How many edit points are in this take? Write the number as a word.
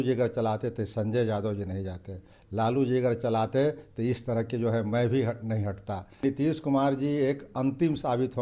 one